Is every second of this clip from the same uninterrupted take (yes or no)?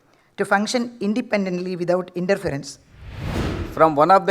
no